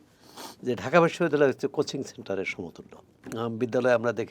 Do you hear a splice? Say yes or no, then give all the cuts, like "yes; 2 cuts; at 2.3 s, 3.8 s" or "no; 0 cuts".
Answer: yes; 1 cut; at 3.2 s